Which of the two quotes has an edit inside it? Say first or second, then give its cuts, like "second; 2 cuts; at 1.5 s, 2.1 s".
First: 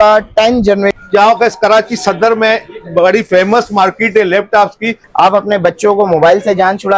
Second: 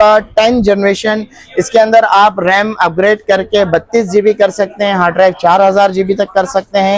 first; 2 cuts; at 1.0 s, 5.0 s